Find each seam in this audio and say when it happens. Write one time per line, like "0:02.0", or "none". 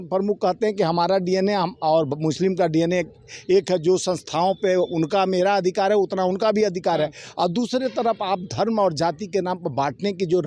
none